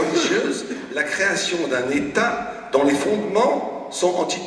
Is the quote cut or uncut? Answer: uncut